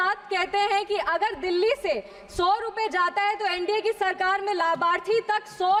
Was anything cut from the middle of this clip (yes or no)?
no